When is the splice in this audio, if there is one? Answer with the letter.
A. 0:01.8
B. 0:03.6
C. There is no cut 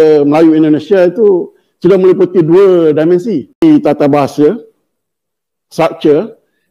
B